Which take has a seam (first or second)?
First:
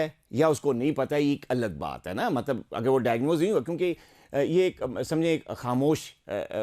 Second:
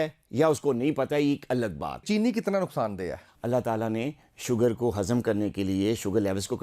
second